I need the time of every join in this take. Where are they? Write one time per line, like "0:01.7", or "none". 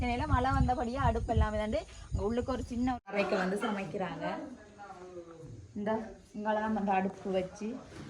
0:03.1